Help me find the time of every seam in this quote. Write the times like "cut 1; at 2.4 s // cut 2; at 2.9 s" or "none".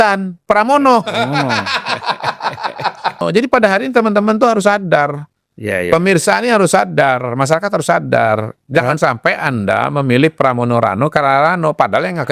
cut 1; at 3.2 s

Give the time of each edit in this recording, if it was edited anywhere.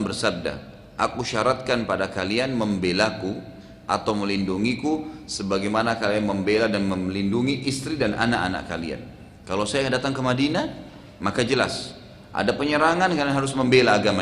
none

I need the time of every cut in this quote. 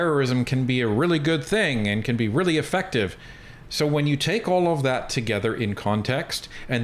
none

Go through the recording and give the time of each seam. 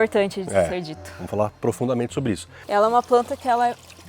cut 1; at 2.6 s

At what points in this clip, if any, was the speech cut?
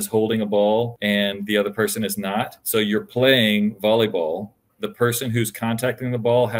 cut 1; at 0.9 s // cut 2; at 2.6 s // cut 3; at 4.7 s

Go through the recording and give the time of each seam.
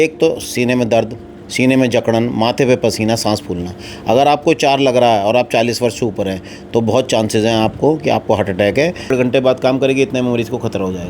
cut 1; at 9.1 s

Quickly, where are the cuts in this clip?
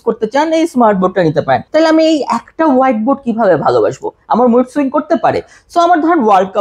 cut 1; at 1.6 s

